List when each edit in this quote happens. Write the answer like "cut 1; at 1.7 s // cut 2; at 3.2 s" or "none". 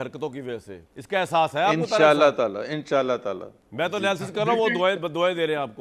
none